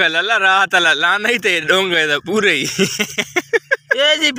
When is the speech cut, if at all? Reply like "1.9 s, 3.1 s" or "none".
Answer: none